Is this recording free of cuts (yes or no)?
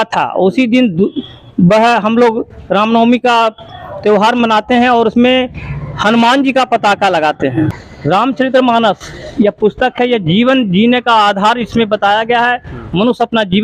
no